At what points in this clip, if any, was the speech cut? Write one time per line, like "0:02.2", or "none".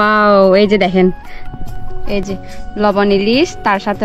0:02.6